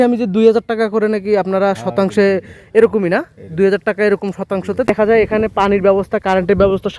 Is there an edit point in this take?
yes; 1 cut; at 4.8 s

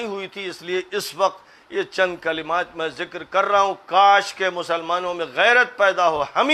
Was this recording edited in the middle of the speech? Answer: no; 0 cuts

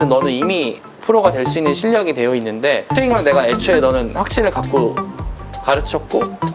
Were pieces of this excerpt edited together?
yes; 1 cut; at 2.9 s

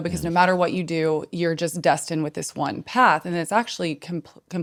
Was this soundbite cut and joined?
no; 0 cuts

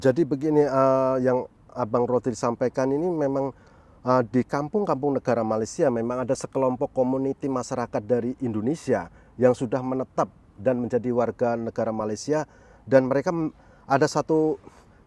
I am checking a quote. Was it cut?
no; 0 cuts

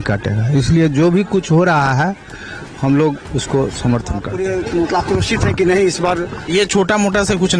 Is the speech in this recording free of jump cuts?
no; 1 cut; at 4.3 s

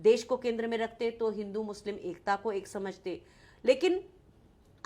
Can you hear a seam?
no; 0 cuts

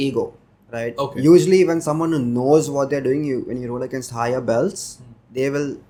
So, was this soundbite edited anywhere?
no; 0 cuts

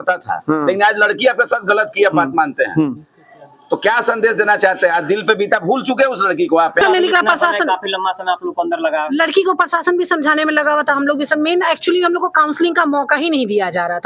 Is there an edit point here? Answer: yes; 1 cut; at 6.8 s

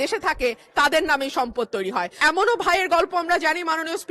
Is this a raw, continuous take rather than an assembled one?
no; 1 cut; at 2.1 s

